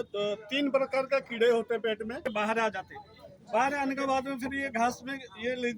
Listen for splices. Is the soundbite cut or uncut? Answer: cut